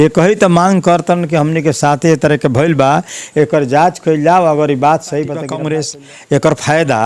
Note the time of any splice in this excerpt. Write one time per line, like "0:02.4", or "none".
0:05.6